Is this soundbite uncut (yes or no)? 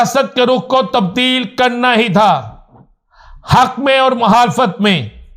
yes